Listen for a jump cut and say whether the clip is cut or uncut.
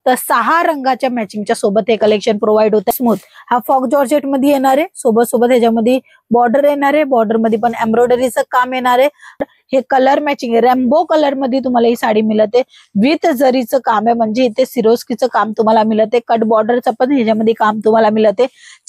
cut